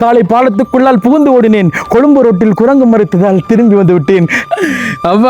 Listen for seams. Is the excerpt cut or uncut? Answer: cut